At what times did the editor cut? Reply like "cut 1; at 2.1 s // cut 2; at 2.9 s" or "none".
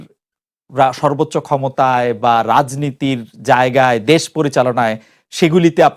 none

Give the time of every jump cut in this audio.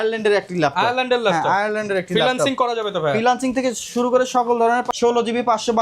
cut 1; at 4.9 s

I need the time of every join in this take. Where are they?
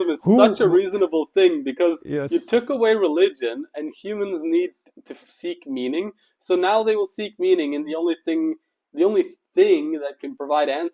none

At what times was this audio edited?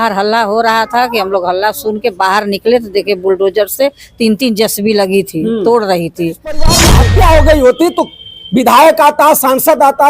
cut 1; at 6.8 s

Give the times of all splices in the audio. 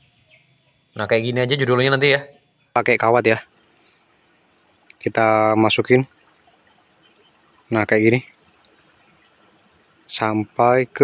cut 1; at 2.7 s

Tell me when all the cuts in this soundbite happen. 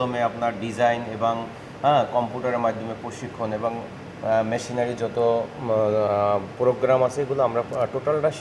none

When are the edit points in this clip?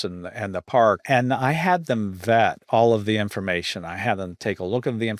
cut 1; at 1.0 s

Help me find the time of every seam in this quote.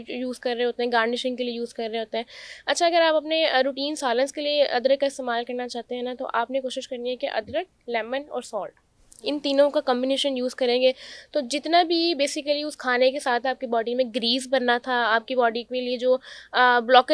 none

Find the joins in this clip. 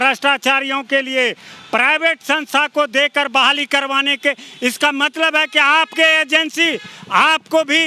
none

